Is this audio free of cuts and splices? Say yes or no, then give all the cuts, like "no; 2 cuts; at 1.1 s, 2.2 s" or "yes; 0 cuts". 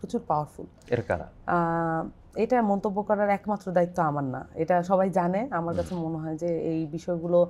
yes; 0 cuts